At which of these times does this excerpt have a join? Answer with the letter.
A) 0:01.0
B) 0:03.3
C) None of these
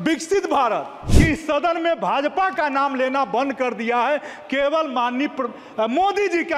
A